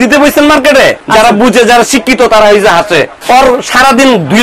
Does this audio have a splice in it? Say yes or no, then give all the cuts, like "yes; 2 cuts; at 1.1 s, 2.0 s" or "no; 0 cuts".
yes; 2 cuts; at 1.0 s, 3.1 s